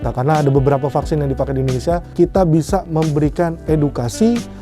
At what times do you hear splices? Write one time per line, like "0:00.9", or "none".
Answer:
0:02.1